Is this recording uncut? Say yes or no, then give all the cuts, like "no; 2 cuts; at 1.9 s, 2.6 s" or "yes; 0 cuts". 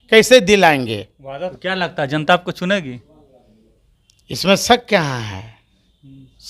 no; 1 cut; at 1.6 s